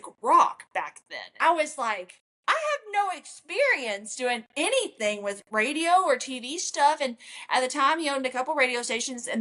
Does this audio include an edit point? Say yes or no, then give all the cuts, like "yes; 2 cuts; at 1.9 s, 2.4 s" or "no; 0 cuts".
yes; 1 cut; at 1.2 s